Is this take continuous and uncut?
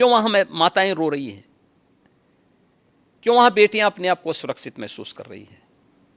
yes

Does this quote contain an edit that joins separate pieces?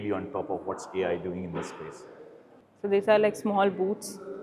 no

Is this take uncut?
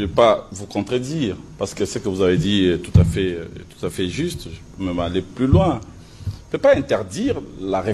yes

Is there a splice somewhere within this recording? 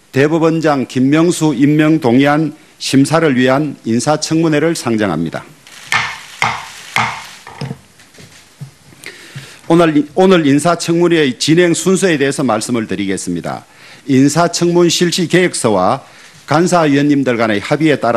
yes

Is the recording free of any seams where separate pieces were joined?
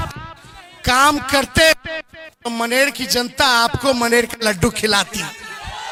yes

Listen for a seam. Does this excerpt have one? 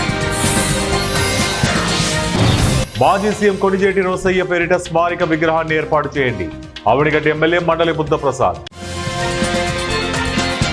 no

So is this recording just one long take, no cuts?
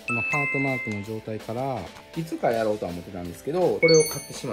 no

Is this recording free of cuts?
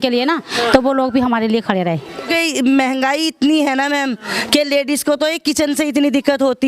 no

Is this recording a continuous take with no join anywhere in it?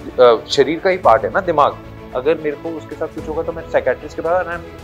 yes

